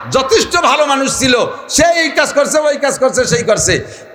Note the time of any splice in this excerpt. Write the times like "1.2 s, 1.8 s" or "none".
none